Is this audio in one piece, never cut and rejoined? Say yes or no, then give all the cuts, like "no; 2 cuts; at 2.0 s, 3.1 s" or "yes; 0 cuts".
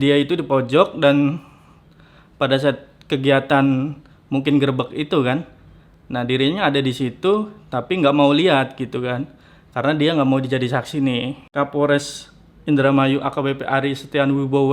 no; 1 cut; at 11.4 s